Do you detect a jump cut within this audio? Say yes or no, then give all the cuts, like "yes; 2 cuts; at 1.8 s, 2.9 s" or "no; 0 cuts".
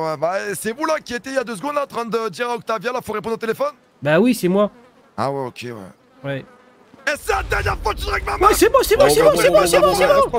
no; 0 cuts